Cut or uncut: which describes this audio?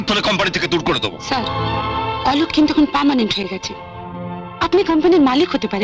uncut